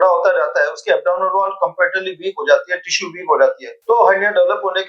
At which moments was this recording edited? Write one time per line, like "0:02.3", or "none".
none